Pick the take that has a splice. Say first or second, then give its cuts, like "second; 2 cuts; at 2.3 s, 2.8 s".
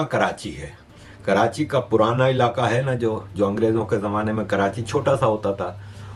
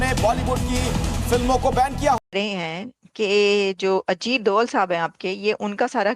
second; 1 cut; at 2.2 s